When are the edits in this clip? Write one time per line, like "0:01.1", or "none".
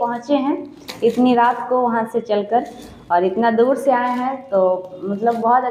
none